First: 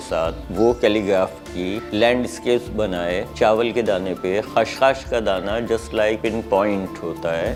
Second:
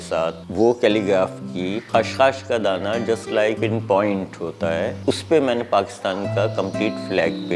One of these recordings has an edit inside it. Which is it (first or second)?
second